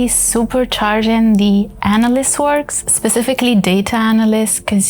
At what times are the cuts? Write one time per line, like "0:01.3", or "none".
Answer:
0:02.8